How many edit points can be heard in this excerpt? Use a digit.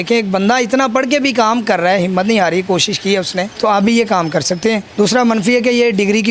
2